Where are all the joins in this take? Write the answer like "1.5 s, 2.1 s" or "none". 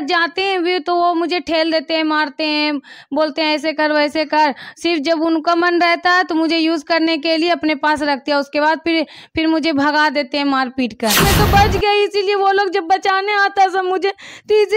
11.2 s